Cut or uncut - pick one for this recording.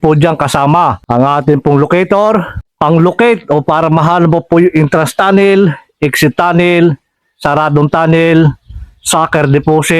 cut